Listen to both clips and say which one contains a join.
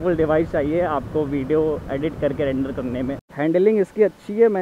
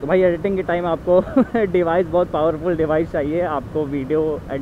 first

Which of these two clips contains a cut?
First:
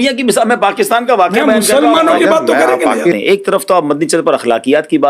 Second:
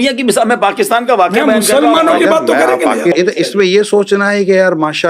first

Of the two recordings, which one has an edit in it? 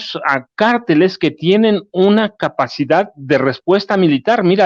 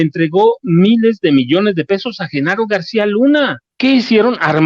second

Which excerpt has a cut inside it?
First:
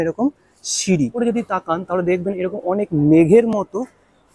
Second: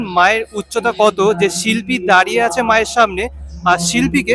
first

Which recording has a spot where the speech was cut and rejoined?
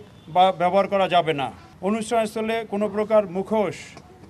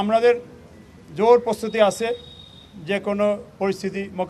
first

